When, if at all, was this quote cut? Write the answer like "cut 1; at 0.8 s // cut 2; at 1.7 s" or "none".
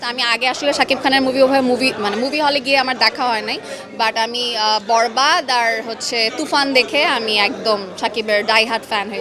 none